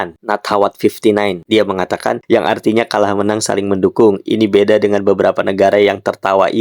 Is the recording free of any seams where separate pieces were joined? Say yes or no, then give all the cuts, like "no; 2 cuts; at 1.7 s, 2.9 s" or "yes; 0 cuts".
no; 1 cut; at 2.2 s